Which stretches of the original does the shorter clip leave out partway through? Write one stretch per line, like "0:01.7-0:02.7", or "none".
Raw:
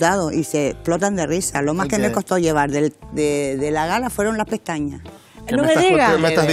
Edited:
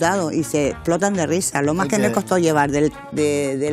none